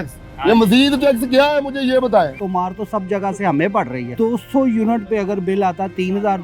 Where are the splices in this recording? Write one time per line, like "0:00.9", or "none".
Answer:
0:02.3
0:04.0